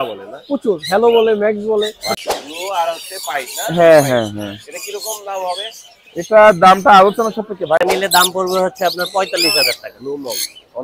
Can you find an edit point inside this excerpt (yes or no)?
yes